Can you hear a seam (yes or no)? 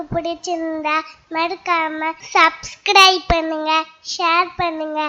yes